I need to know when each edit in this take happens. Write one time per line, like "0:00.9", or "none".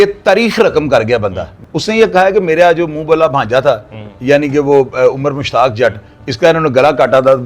0:01.5